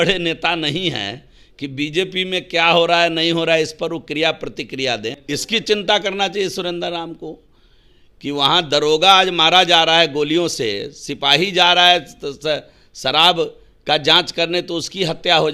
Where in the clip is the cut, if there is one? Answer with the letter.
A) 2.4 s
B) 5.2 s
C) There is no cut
B